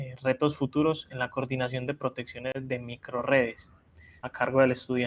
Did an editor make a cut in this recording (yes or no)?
yes